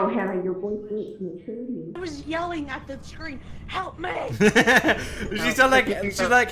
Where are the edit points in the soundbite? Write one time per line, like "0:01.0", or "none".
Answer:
0:02.0